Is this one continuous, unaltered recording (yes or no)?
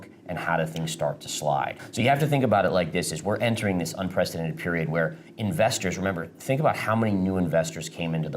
no